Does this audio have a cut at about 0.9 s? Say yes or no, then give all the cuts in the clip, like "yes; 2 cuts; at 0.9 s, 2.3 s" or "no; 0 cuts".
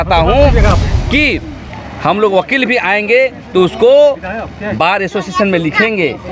yes; 1 cut; at 0.9 s